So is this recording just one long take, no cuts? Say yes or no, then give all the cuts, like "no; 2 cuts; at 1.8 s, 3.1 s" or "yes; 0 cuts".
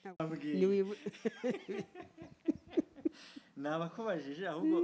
yes; 0 cuts